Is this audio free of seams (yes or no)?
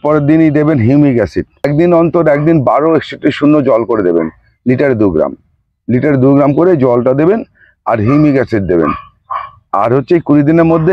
no